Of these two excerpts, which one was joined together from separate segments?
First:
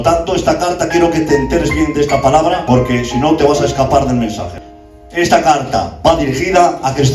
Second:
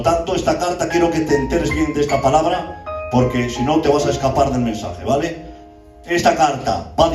first; 2 cuts; at 2.6 s, 4.5 s

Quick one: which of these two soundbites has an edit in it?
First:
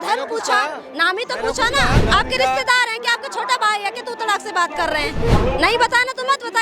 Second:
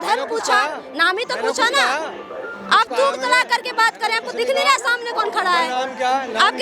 first; 2 cuts; at 2.0 s, 5.3 s

